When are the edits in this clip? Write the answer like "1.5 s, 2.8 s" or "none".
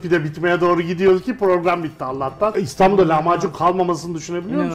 2.5 s